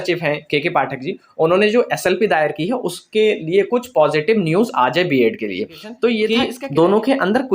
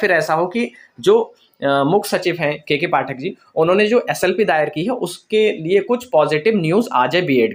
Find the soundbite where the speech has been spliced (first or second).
first